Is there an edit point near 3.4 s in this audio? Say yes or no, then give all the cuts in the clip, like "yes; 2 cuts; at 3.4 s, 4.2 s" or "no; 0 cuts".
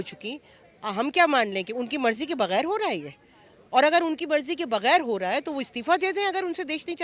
no; 0 cuts